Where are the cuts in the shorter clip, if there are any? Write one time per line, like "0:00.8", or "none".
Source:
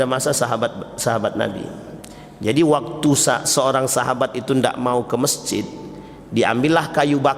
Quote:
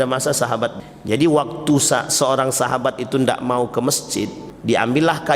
0:00.9
0:04.4